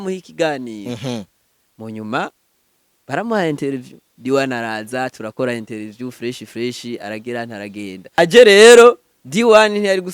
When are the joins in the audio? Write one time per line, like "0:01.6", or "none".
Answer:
0:08.2